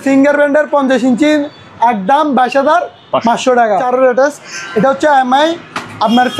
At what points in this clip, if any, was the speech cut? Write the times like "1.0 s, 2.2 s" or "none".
3.8 s